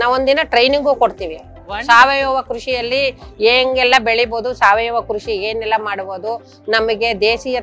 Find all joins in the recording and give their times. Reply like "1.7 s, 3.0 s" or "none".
none